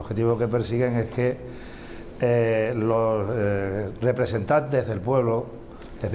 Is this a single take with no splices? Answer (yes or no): no